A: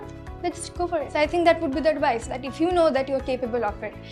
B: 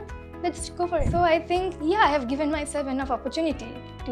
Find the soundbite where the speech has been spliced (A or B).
B